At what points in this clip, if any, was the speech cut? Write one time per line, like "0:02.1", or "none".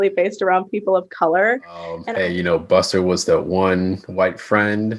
0:02.0